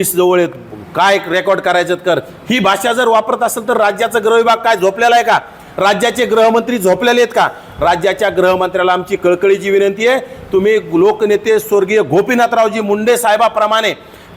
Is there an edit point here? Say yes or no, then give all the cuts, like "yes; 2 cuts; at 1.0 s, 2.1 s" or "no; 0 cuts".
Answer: no; 0 cuts